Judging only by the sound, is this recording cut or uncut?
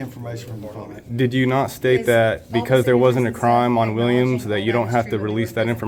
uncut